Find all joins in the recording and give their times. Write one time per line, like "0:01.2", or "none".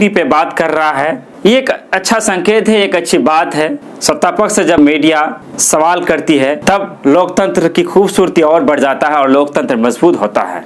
0:03.8
0:04.8
0:06.6